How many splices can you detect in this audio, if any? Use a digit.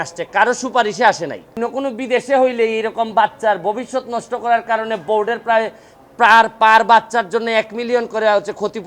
1